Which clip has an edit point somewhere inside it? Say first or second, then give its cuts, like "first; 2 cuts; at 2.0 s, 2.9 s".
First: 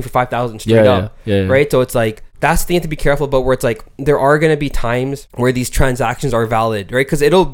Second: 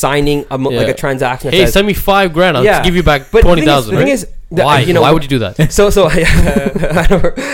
first; 2 cuts; at 2.2 s, 5.2 s